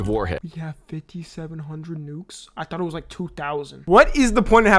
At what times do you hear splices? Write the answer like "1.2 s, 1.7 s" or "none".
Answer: 3.8 s